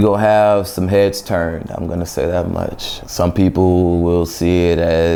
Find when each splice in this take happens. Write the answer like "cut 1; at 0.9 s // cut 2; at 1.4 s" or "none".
none